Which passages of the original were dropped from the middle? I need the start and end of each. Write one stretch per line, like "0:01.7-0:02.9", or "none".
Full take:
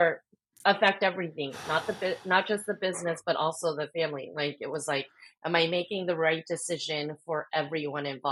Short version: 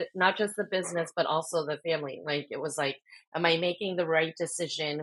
none